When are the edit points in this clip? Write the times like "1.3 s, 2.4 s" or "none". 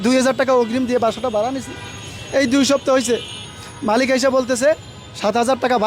none

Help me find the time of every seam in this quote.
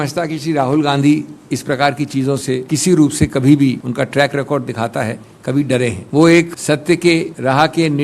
2.6 s, 3.8 s, 6.0 s, 6.9 s

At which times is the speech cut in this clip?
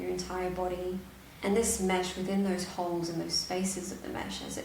none

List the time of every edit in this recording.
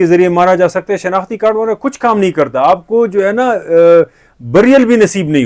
none

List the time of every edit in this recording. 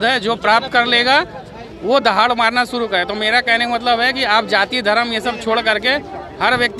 none

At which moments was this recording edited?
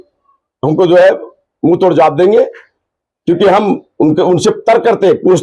none

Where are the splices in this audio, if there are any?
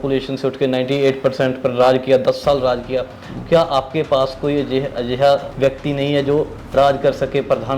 5.5 s

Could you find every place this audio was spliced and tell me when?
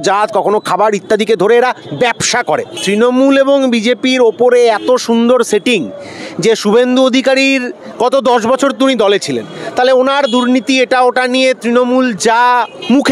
2.7 s

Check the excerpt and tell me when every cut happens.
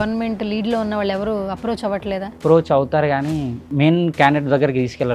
2.3 s, 3.7 s

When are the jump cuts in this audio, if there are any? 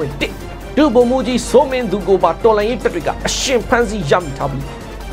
none

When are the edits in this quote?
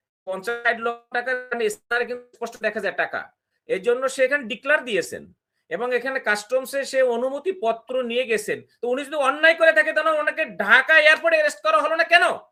none

